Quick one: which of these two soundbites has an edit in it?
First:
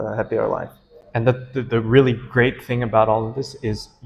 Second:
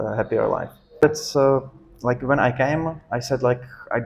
second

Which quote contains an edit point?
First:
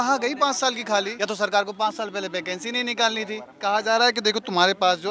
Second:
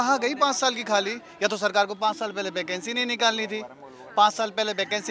first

